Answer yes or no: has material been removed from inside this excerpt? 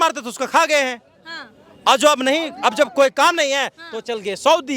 no